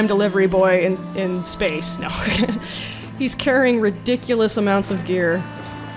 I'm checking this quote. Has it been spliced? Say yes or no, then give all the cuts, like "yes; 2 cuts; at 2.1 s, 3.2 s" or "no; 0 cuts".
no; 0 cuts